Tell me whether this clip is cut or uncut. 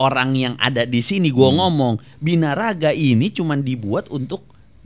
uncut